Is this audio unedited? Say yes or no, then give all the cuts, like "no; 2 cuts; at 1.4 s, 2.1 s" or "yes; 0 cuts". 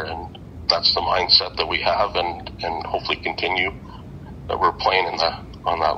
yes; 0 cuts